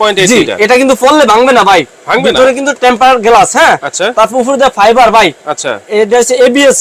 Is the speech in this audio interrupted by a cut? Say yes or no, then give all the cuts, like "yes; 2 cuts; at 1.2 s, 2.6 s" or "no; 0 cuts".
no; 0 cuts